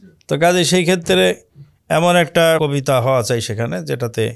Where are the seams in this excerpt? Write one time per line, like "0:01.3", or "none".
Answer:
0:02.6